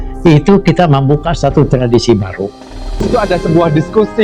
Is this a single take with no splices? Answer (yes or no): no